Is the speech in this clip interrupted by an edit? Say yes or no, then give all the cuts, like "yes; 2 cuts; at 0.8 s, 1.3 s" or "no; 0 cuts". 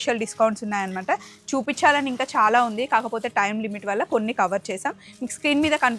no; 0 cuts